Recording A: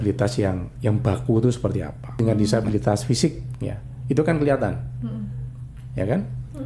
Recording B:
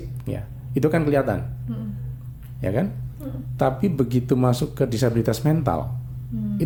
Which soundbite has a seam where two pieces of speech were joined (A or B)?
A